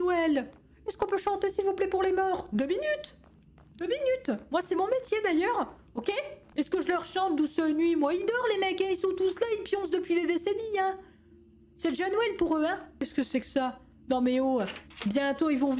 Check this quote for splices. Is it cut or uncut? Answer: cut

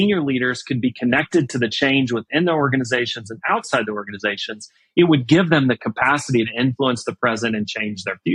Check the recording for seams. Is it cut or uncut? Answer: uncut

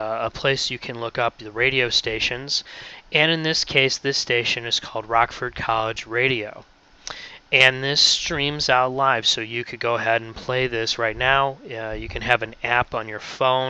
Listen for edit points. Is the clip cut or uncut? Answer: uncut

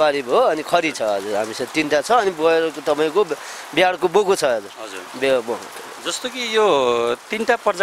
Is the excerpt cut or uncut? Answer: uncut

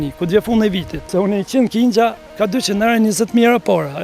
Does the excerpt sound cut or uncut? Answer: cut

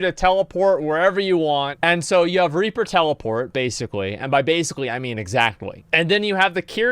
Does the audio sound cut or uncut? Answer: cut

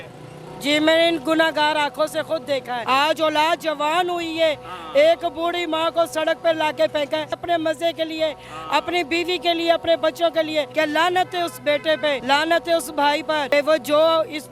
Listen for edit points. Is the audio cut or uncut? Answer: cut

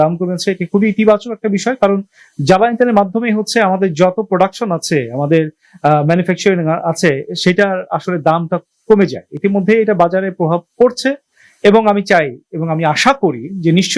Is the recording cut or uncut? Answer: uncut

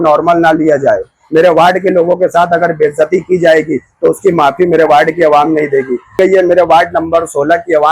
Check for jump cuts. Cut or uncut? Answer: cut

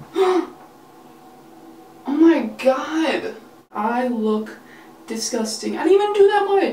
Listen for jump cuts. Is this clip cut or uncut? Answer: cut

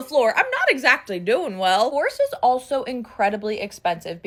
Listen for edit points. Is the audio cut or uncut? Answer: uncut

